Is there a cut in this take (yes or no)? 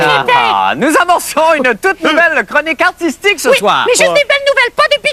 yes